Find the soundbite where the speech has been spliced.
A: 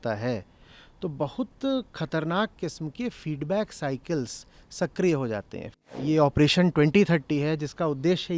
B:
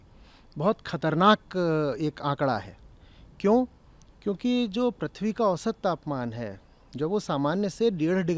A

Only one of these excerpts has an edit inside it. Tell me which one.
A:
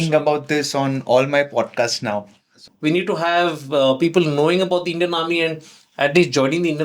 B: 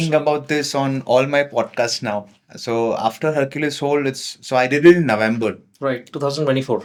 A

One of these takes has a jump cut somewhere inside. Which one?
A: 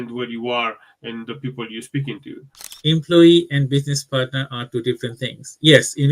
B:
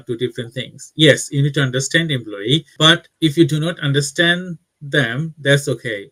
A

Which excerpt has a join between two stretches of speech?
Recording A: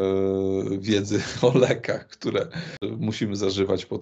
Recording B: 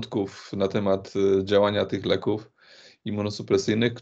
A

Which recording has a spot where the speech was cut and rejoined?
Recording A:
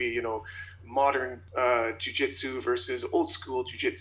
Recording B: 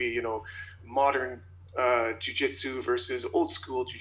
A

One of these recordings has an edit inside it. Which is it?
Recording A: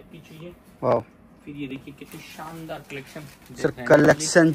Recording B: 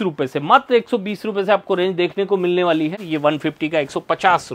B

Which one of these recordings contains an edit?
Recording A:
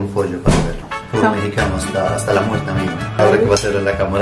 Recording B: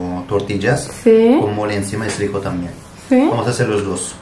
A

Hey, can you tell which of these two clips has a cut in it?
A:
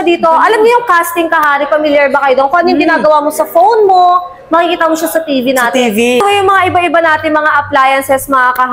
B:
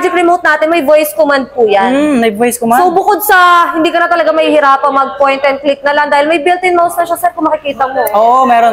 A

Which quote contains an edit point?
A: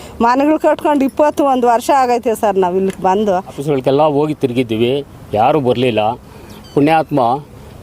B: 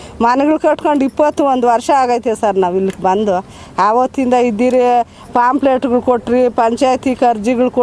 A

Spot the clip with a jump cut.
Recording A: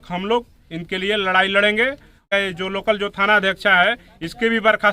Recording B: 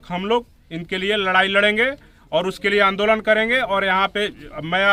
A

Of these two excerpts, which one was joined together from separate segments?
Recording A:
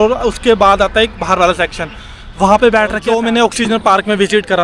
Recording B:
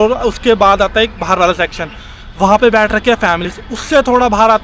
A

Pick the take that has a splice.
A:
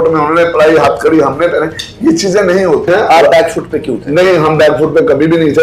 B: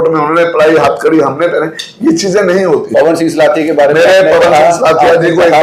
A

